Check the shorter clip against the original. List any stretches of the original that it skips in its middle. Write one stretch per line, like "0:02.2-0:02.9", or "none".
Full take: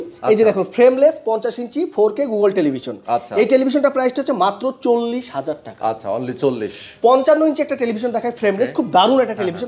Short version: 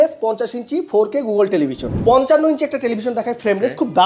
0:02.9-0:06.8